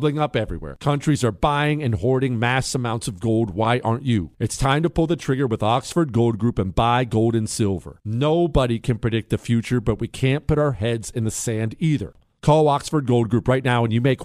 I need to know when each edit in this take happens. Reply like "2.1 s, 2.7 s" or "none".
12.1 s